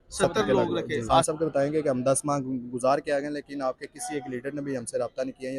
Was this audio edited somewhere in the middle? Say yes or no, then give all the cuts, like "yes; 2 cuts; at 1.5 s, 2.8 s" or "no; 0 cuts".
yes; 1 cut; at 1.3 s